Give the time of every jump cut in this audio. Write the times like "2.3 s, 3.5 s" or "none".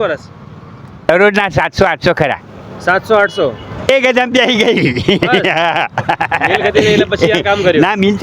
1.1 s, 3.9 s